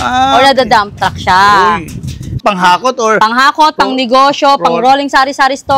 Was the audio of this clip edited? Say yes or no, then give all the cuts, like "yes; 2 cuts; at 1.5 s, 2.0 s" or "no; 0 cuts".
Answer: yes; 1 cut; at 2.4 s